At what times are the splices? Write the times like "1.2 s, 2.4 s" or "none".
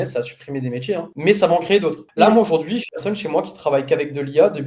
none